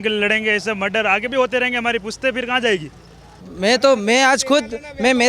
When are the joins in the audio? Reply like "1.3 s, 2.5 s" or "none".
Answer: 3.4 s